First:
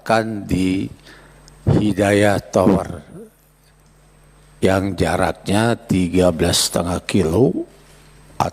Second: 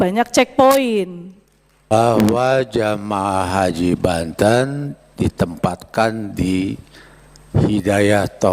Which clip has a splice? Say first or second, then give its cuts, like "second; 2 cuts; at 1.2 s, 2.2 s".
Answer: second; 1 cut; at 1.9 s